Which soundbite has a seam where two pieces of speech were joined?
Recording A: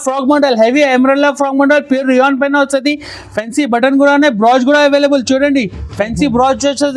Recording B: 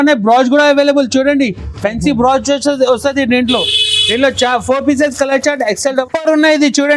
B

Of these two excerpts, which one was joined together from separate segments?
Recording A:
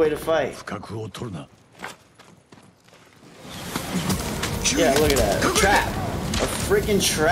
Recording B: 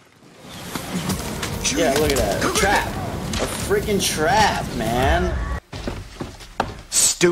B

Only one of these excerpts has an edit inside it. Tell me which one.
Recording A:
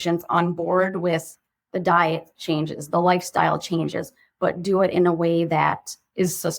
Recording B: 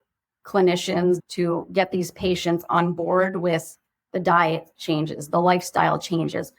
B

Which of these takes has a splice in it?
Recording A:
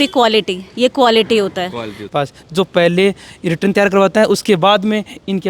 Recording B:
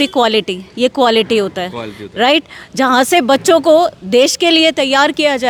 A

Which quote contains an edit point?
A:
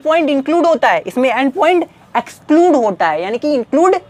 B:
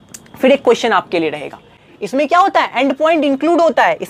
B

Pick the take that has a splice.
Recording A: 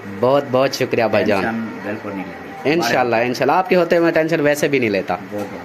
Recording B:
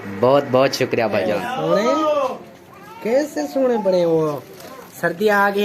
B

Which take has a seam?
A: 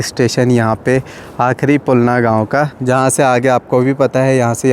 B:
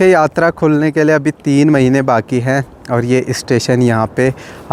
A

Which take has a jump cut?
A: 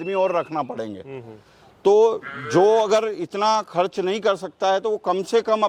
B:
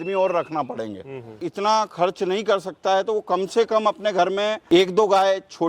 B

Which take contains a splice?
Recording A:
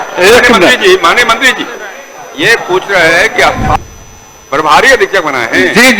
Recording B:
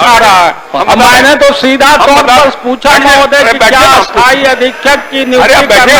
A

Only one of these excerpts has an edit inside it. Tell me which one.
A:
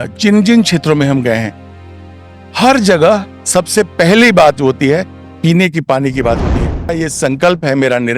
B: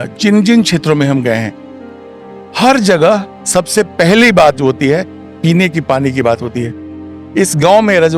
A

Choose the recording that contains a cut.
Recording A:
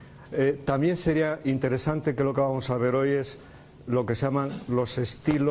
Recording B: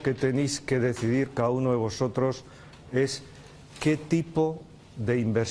A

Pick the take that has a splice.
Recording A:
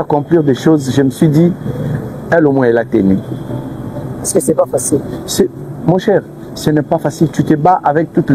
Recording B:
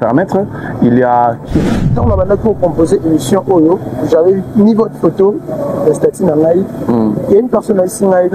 B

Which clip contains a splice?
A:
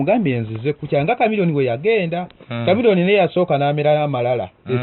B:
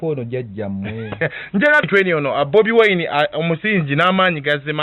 B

